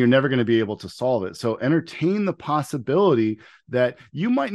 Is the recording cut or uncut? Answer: uncut